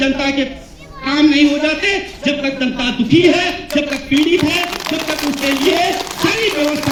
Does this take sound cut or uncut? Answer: uncut